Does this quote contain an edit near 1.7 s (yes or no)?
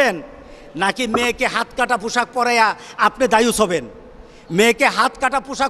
no